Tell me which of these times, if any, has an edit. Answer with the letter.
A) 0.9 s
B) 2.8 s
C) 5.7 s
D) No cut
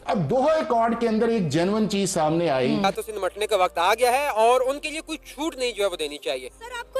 B